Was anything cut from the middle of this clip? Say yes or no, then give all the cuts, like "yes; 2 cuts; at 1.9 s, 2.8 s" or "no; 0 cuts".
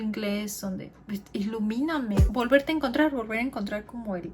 yes; 1 cut; at 2.2 s